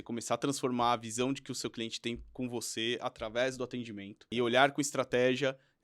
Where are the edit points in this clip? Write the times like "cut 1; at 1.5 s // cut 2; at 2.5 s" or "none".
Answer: cut 1; at 4.4 s